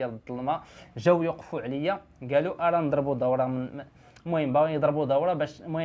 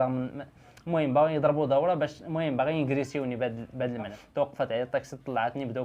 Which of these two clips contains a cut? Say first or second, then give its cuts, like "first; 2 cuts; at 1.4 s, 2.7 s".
second; 1 cut; at 4.1 s